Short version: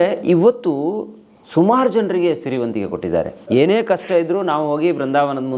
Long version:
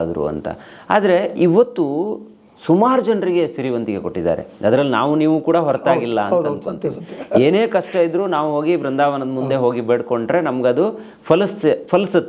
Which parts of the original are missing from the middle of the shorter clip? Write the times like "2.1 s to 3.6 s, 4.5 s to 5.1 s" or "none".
4.6 s to 7.4 s